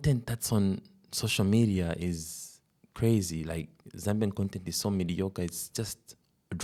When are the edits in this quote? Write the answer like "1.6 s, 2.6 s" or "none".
none